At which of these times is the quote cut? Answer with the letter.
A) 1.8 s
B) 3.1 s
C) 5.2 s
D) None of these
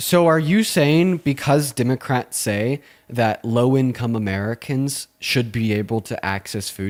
D